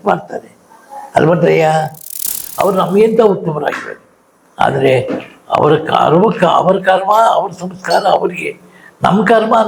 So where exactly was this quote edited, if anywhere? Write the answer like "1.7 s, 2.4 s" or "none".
2.1 s